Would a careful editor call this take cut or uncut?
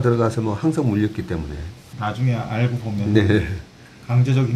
cut